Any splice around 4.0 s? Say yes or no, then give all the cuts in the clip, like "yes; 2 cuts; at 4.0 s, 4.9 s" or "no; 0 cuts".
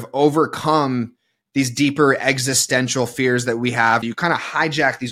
yes; 1 cut; at 4.0 s